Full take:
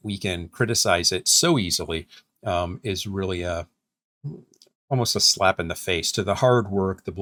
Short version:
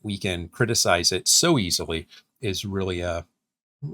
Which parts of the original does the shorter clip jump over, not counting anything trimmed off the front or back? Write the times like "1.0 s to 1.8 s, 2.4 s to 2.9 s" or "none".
2.3 s to 2.8 s